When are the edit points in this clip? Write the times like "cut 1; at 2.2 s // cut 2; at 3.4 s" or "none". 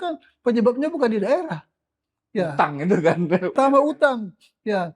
cut 1; at 3.5 s